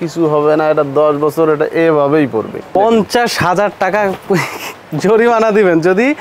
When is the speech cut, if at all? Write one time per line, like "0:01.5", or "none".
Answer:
0:02.6